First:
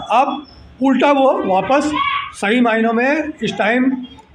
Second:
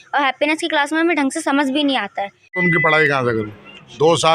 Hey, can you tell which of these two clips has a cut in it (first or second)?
second